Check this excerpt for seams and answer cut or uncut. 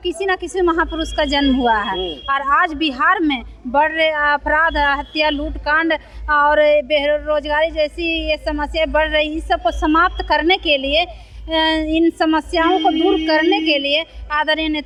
uncut